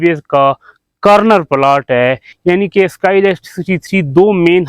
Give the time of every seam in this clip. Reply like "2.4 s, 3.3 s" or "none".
2.3 s